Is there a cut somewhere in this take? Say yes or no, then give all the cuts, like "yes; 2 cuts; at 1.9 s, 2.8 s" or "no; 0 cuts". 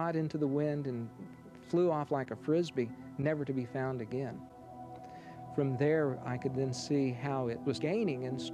no; 0 cuts